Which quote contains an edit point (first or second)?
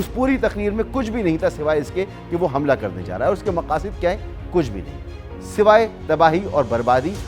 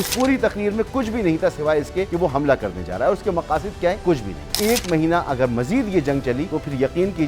second